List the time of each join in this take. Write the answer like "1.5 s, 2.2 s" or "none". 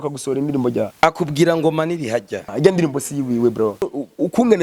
0.9 s, 2.4 s, 3.8 s